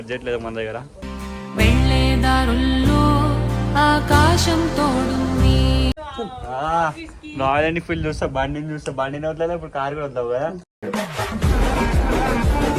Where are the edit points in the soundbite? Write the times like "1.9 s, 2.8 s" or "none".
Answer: 5.9 s